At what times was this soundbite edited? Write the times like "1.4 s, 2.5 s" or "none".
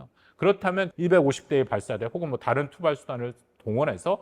0.9 s